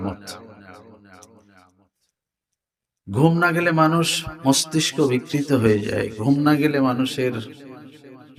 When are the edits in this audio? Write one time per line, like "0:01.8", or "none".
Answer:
none